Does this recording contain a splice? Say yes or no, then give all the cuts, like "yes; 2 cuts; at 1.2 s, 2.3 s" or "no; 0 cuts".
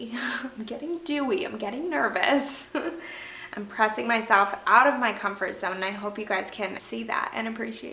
yes; 1 cut; at 6.8 s